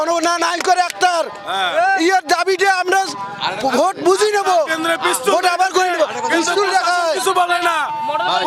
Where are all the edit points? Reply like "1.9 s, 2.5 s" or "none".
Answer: none